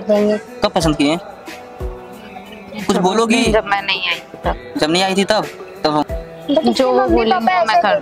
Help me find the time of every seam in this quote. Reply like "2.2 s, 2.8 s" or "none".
6.0 s